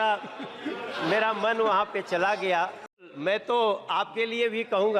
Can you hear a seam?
yes; 1 cut; at 3.1 s

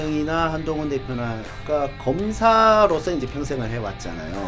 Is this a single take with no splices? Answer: no; 1 cut; at 1.5 s

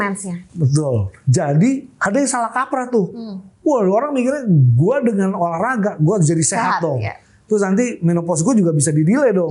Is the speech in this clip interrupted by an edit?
yes; 2 cuts; at 1.1 s, 1.9 s

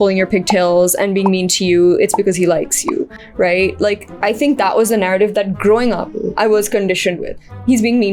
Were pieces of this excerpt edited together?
no; 0 cuts

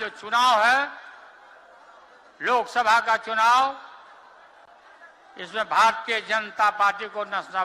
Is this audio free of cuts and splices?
yes; 0 cuts

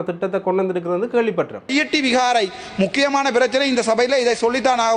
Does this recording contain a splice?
yes; 1 cut; at 1.7 s

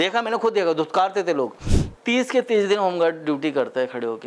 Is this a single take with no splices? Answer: no; 1 cut; at 1.6 s

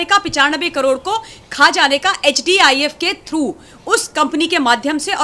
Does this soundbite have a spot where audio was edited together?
no; 0 cuts

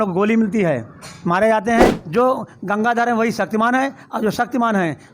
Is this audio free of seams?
no; 1 cut; at 2.0 s

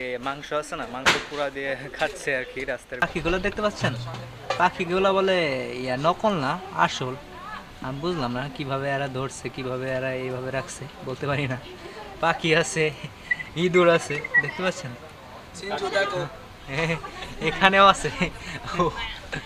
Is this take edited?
yes; 1 cut; at 3.0 s

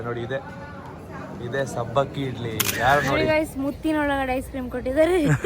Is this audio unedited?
no; 1 cut; at 3.1 s

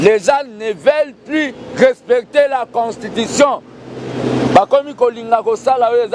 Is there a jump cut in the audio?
no; 0 cuts

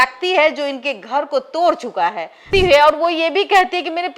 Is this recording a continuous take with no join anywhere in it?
no; 1 cut; at 2.4 s

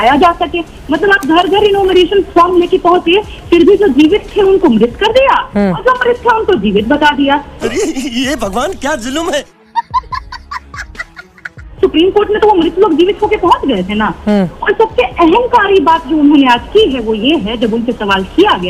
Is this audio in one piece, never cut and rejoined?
yes; 0 cuts

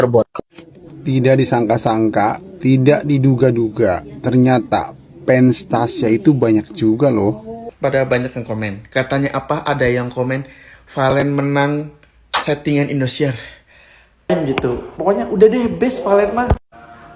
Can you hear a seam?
yes; 2 cuts; at 7.7 s, 14.3 s

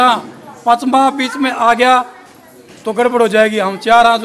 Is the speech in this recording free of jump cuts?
yes; 0 cuts

